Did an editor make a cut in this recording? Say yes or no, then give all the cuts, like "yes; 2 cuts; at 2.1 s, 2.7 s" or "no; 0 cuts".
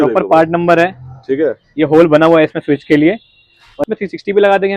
yes; 1 cut; at 3.8 s